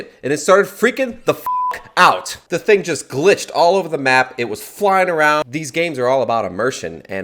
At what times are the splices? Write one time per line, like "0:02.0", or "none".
0:05.4